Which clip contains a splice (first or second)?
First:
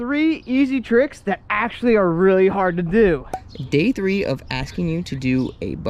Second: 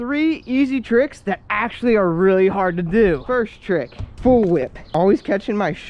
first